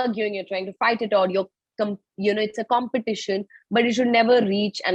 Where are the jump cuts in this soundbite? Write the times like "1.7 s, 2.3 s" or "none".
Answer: none